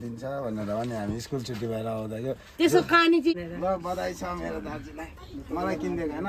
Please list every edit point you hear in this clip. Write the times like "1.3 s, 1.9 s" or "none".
3.3 s